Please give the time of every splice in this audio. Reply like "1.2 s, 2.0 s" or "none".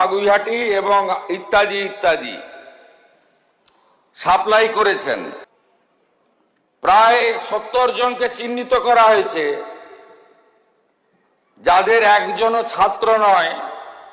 5.4 s